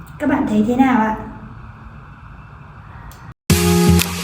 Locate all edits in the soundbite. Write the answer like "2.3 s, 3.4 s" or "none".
3.3 s